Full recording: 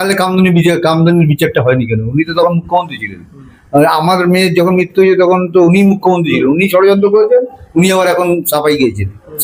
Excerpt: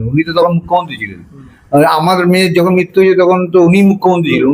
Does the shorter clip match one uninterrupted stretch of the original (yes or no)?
yes